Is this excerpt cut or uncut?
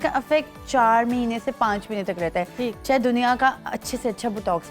uncut